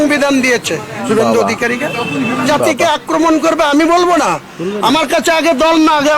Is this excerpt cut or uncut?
cut